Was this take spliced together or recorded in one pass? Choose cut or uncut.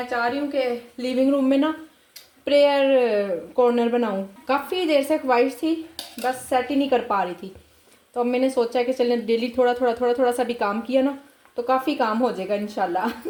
uncut